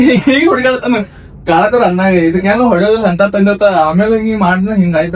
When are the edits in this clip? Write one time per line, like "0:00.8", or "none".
none